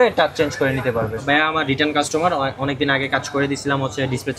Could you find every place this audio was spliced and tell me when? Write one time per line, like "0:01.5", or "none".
0:01.2